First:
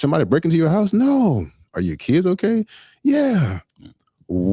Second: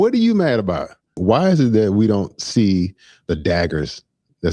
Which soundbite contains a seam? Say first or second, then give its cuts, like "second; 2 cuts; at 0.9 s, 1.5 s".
second; 1 cut; at 1.1 s